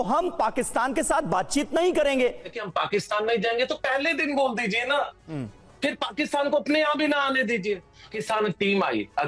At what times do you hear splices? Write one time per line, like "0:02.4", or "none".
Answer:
0:02.6
0:08.1